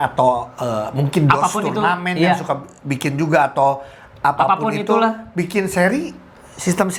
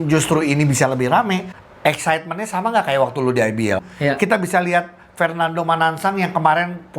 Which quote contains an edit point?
second; 2 cuts; at 1.6 s, 3.8 s

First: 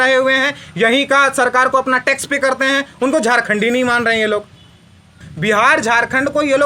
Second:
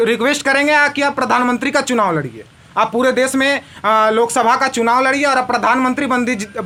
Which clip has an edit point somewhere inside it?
first; 1 cut; at 5.1 s

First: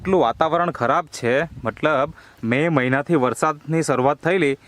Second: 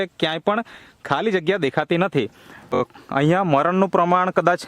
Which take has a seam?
second; 1 cut; at 2.8 s

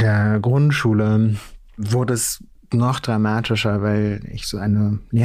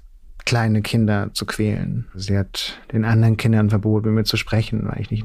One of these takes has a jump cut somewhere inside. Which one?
second; 1 cut; at 2.1 s

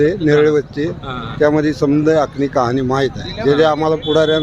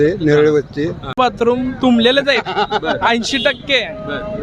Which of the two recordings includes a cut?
second; 1 cut; at 1.2 s

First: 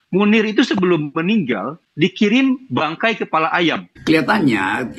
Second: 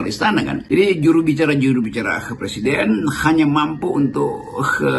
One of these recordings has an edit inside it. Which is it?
first; 1 cut; at 3.9 s

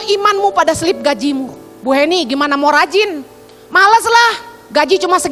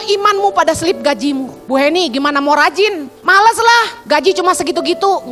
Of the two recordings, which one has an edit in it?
second; 3 cuts; at 1.5 s, 3.1 s, 4.0 s

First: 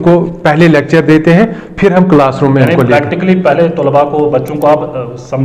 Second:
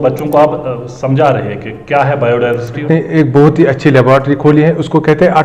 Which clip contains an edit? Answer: second; 1 cut; at 2.8 s

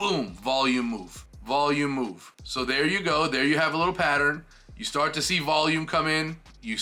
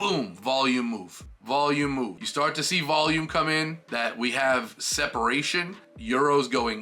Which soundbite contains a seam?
second; 2 cuts; at 2.2 s, 3.8 s

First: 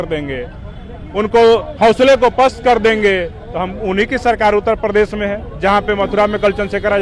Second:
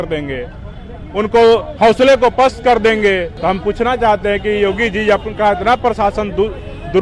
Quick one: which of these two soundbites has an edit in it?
second; 1 cut; at 3.3 s

